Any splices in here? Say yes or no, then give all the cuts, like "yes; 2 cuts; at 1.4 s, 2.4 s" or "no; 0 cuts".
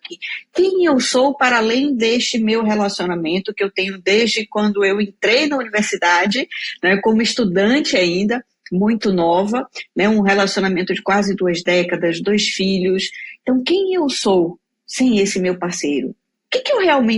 no; 0 cuts